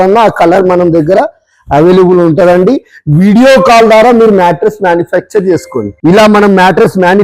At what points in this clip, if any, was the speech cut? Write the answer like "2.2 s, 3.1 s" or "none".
5.8 s